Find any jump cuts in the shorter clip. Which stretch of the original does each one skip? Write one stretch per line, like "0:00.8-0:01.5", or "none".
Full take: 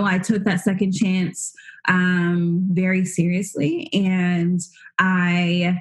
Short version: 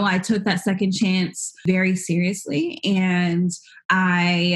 0:01.6-0:02.7

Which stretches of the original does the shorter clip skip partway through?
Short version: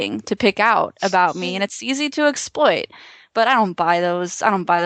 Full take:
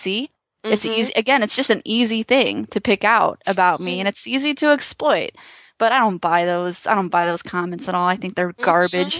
none

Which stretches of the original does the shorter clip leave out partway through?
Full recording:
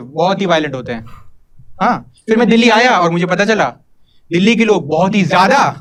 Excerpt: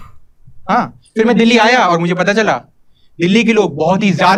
none

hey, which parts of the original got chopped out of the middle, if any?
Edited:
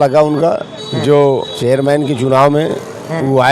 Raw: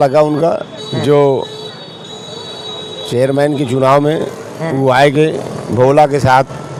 0:01.5-0:03.0

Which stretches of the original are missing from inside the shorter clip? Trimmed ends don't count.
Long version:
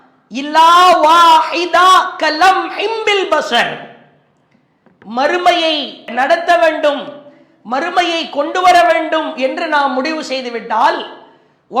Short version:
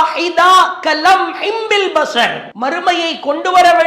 0:03.8-0:07.5

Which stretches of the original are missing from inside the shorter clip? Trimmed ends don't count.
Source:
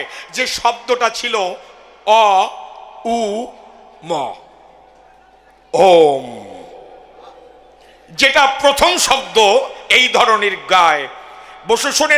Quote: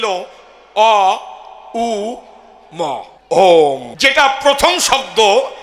0:04.4-0:05.6
0:06.3-0:08.1

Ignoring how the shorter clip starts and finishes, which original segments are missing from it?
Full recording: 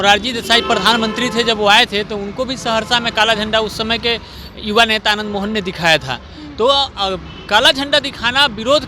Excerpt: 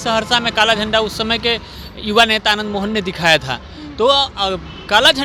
none

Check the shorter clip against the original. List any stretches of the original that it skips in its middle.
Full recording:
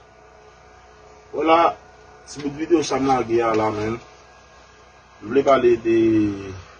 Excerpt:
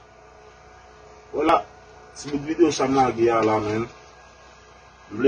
0:01.5-0:01.6

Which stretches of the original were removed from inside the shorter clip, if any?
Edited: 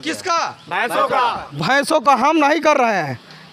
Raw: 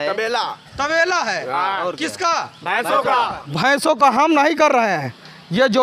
none

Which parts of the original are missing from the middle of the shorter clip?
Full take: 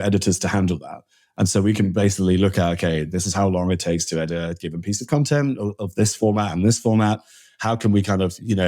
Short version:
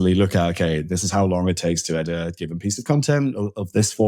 none

